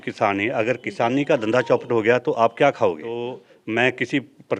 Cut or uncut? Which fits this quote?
cut